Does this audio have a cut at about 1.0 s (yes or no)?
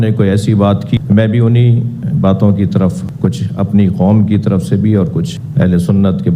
yes